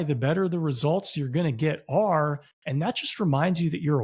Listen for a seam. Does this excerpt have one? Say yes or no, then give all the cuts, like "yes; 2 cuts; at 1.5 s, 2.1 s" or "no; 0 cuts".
no; 0 cuts